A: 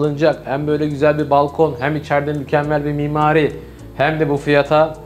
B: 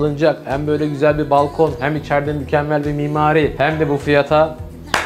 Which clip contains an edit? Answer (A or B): B